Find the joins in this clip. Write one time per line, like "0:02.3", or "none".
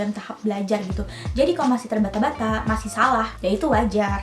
0:03.3